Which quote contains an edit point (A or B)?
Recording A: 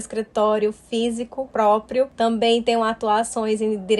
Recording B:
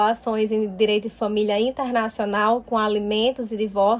A